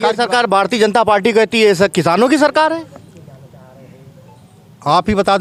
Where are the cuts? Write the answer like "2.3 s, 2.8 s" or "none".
none